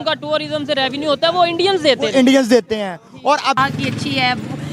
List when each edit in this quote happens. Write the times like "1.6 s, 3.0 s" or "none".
3.6 s